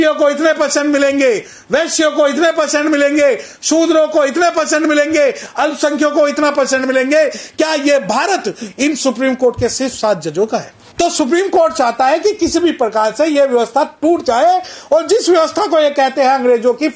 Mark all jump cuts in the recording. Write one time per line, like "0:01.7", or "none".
0:10.8